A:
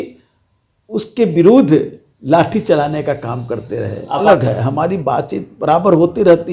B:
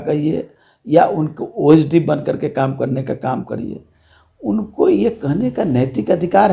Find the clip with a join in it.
A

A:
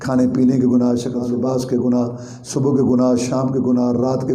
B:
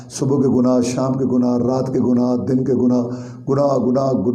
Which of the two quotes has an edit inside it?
A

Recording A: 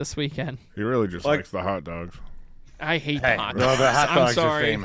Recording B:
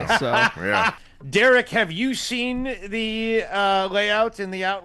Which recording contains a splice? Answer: B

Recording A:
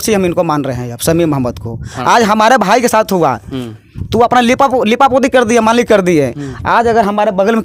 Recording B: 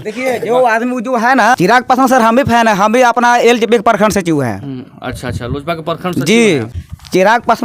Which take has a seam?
B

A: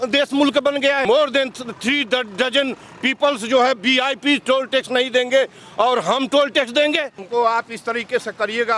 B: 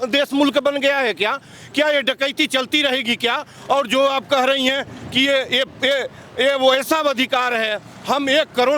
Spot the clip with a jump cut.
A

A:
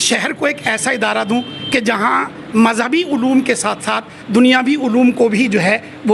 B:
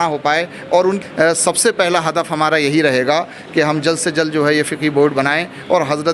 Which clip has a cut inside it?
B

